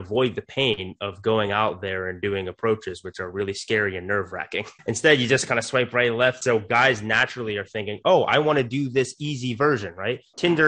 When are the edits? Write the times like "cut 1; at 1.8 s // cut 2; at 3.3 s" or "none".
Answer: cut 1; at 4.7 s // cut 2; at 6.4 s